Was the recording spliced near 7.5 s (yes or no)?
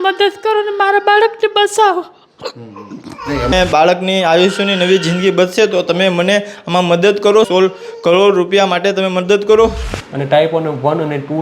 yes